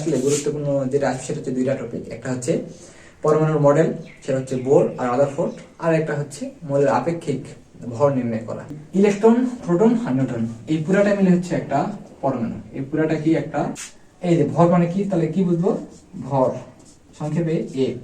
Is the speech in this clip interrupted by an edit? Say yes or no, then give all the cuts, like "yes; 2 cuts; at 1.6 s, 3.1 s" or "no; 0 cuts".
yes; 2 cuts; at 8.8 s, 13.8 s